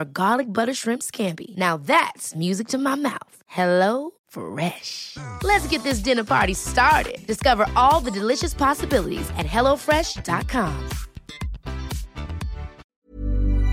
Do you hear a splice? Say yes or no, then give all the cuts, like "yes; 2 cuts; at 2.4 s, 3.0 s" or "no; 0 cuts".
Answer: yes; 1 cut; at 12.8 s